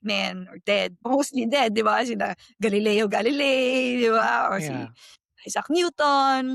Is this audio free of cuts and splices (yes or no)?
yes